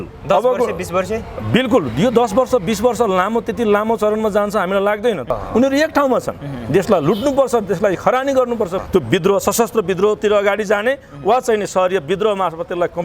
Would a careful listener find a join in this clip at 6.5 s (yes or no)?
no